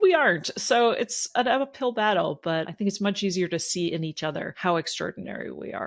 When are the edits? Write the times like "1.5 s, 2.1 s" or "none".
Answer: 1.3 s, 2.7 s, 4.5 s